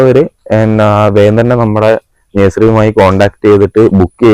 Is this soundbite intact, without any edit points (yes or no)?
yes